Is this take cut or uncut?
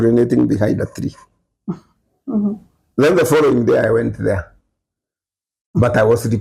uncut